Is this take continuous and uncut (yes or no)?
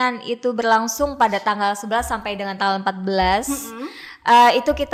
yes